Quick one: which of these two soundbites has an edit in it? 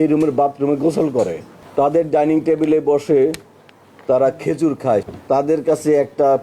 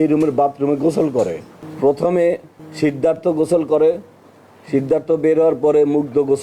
first; 2 cuts; at 1.6 s, 5.1 s

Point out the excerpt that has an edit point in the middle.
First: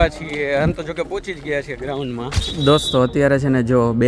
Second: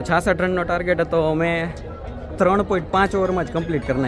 first; 1 cut; at 2.4 s

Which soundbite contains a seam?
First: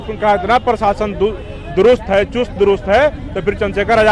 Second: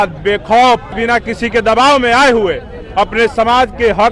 second; 1 cut; at 0.9 s

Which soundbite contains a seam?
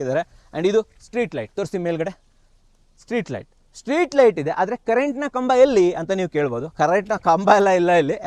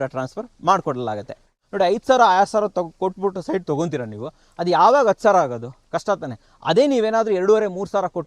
second; 1 cut; at 1.5 s

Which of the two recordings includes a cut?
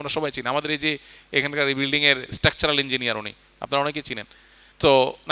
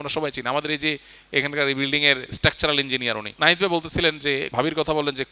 second; 2 cuts; at 3.3 s, 4.5 s

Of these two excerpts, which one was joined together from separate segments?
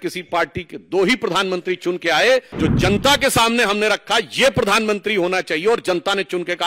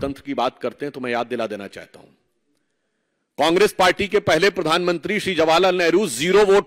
first; 1 cut; at 2.5 s

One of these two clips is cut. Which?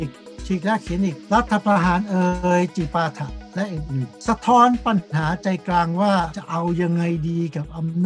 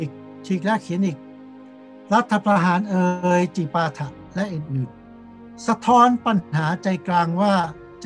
first; 3 cuts; at 1.2 s, 4.1 s, 6.4 s

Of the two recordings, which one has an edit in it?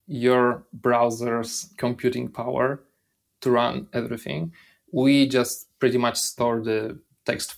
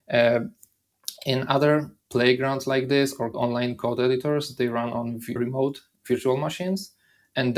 second; 3 cuts; at 2.0 s, 3.3 s, 5.3 s

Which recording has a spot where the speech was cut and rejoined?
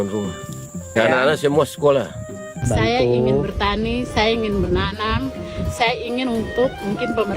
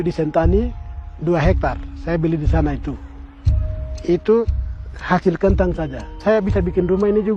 first; 2 cuts; at 0.9 s, 2.6 s

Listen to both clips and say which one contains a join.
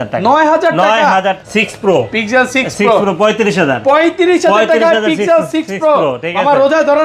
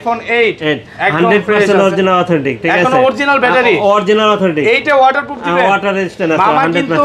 first; 1 cut; at 1.4 s

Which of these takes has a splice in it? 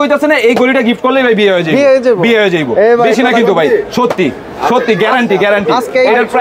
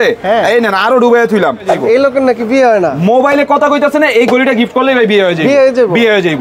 second; 1 cut; at 1.8 s

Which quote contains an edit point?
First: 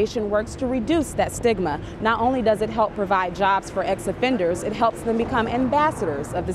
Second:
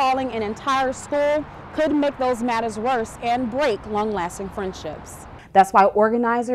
second; 1 cut; at 5.2 s

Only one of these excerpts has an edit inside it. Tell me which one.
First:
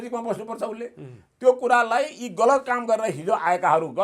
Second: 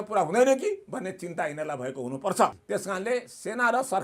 second; 1 cut; at 2.6 s

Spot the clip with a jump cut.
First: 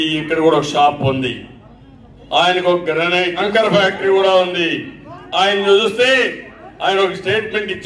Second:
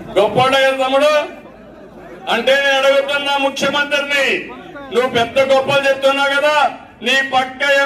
first; 1 cut; at 3.4 s

